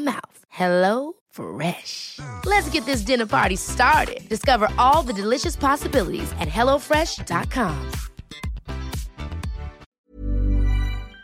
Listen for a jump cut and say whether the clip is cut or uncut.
cut